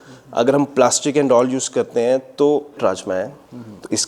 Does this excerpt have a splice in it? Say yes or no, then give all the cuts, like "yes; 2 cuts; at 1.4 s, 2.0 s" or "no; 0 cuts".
yes; 1 cut; at 2.8 s